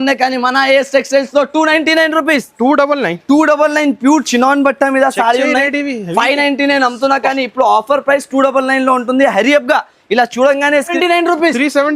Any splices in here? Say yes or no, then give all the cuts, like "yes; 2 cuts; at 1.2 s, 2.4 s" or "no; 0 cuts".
yes; 1 cut; at 10.9 s